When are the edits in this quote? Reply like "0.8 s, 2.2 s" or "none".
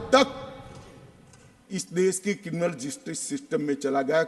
none